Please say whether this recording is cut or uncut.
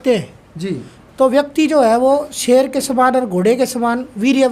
uncut